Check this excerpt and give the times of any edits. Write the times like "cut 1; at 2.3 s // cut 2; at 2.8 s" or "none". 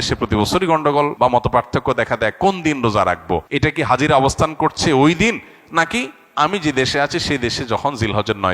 cut 1; at 1.1 s // cut 2; at 3.5 s